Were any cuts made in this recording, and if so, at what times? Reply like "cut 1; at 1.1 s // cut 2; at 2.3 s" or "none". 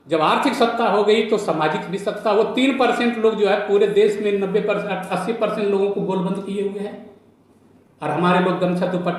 none